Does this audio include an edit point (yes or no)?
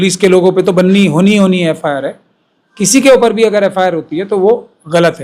no